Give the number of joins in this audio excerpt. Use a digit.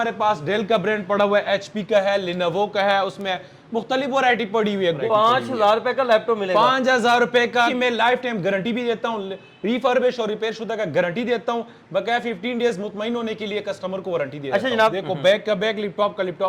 3